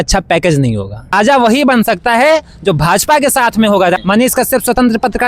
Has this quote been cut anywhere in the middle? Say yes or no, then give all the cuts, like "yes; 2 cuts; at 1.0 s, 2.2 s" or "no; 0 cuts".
yes; 2 cuts; at 1.1 s, 4.0 s